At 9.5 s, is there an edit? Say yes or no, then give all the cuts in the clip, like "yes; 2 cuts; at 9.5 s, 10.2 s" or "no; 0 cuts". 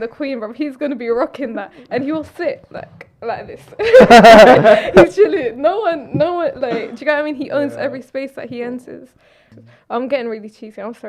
yes; 1 cut; at 9.5 s